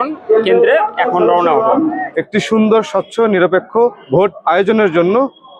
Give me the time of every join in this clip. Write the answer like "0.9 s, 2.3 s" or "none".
2.1 s

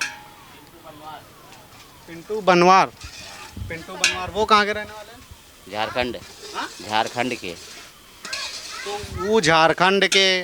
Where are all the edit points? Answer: none

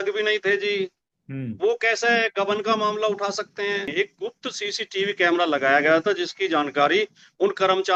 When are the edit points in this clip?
3.9 s

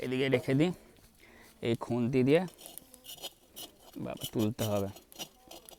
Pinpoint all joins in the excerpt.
none

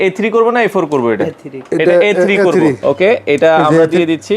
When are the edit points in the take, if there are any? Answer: 2.8 s

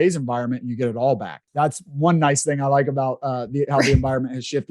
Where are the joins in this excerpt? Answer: 1.4 s

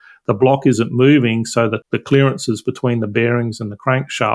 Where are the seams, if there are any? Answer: 1.8 s

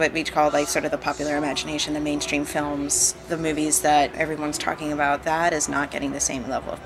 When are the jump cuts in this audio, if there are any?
none

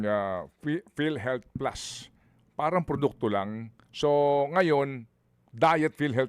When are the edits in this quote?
none

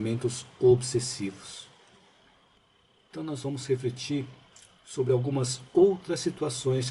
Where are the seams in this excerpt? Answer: 2.6 s

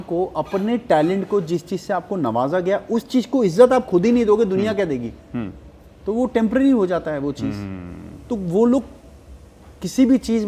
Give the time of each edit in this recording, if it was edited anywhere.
none

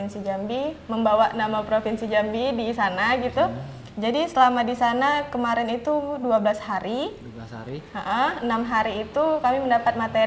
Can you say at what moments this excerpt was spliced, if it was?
none

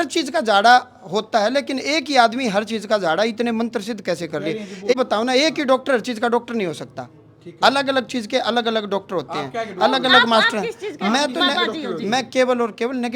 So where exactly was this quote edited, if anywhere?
4.9 s

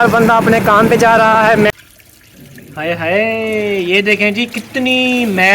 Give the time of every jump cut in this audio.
1.7 s

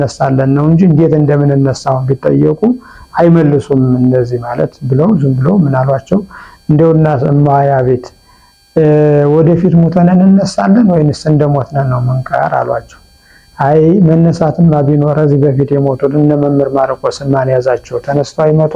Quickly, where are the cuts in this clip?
none

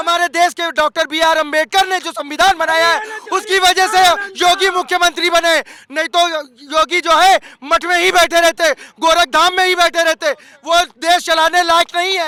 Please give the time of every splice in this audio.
none

